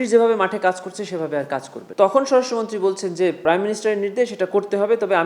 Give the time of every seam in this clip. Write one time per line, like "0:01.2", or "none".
0:01.8
0:03.4